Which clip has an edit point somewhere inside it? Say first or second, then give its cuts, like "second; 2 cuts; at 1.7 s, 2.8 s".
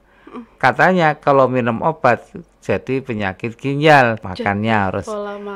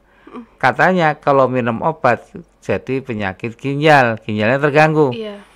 first; 1 cut; at 4.2 s